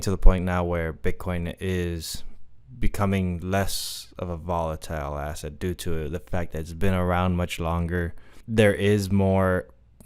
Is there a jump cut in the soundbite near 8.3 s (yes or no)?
yes